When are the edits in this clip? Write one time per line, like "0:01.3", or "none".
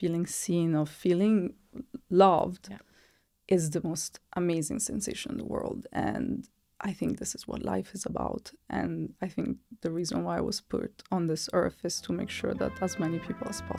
none